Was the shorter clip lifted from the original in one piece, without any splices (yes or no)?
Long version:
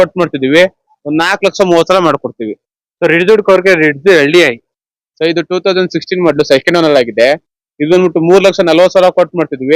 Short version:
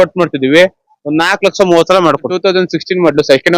no